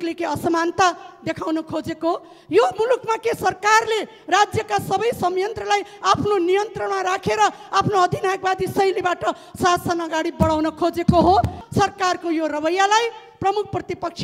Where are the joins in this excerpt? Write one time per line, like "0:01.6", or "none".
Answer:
0:11.5